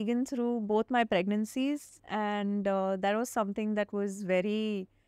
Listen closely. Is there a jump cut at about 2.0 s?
yes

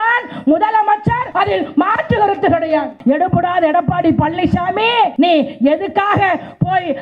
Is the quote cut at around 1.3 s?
yes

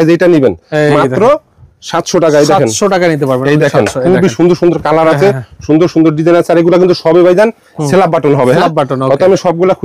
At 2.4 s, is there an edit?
no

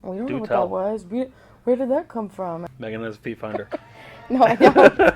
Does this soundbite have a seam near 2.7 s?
yes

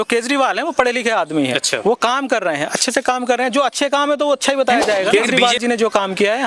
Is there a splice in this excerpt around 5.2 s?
yes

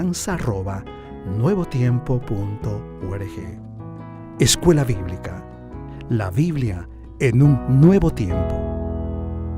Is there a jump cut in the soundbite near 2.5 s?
no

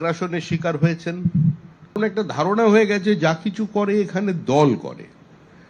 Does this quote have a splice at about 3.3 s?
no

